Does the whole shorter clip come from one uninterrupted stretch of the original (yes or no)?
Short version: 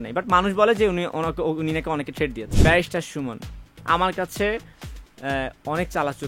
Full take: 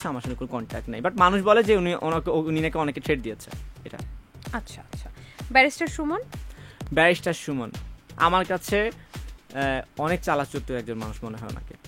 no